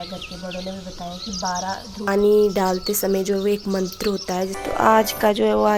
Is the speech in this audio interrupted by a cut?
yes; 2 cuts; at 2.1 s, 4.6 s

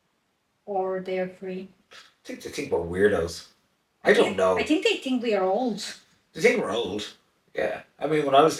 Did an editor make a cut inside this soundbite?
no; 0 cuts

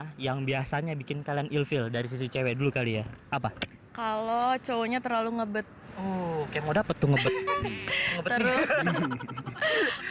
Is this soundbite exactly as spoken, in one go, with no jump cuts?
yes; 0 cuts

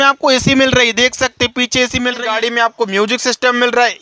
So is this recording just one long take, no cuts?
no; 1 cut; at 2.2 s

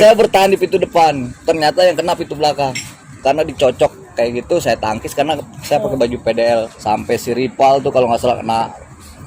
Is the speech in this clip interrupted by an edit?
yes; 2 cuts; at 3.2 s, 6.7 s

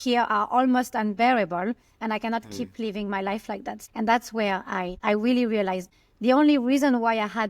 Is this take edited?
yes; 3 cuts; at 3.8 s, 4.9 s, 5.8 s

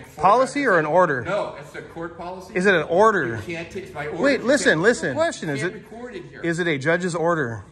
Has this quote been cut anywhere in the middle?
yes; 1 cut; at 5.3 s

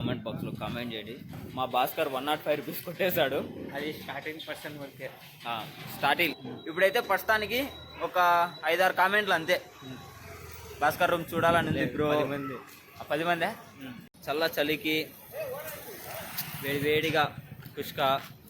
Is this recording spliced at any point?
yes; 2 cuts; at 6.4 s, 13.9 s

